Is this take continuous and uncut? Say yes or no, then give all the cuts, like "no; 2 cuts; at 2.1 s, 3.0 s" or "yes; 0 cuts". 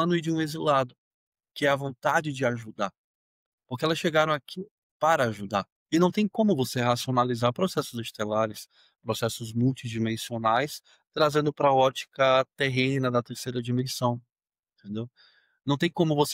no; 1 cut; at 5.8 s